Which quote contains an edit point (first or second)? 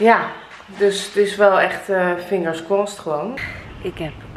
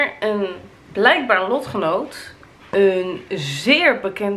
first